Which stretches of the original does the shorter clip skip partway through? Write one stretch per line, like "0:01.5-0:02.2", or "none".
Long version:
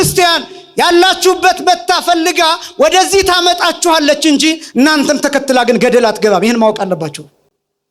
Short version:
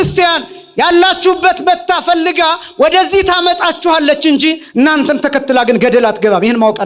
none